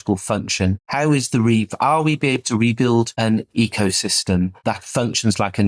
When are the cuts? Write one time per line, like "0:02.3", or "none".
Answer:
0:00.8
0:03.1
0:04.6